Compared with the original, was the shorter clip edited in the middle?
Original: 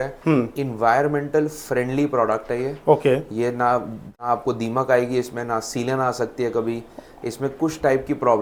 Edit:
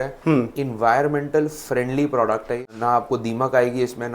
yes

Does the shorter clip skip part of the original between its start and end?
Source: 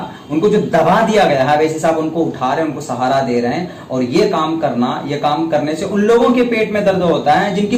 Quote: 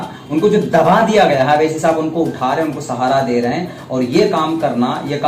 no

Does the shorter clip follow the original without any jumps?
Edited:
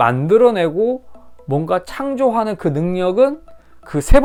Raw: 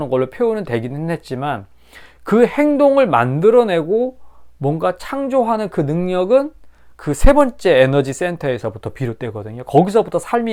yes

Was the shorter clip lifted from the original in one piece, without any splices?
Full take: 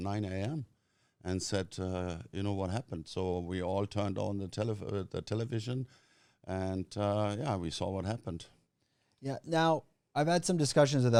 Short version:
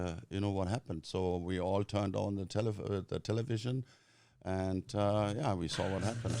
yes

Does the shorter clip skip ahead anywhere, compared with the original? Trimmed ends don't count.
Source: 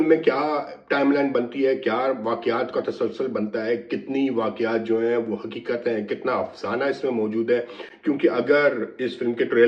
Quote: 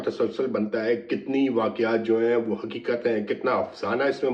no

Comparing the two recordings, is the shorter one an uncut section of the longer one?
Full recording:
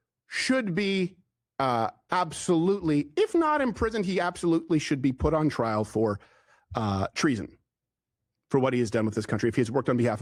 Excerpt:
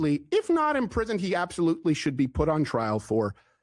yes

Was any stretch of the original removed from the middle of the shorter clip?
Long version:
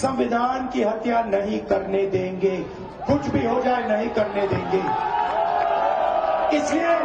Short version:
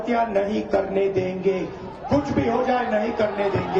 no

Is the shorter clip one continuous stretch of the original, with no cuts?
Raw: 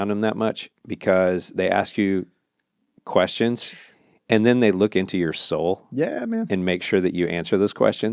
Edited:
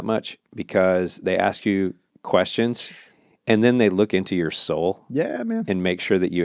no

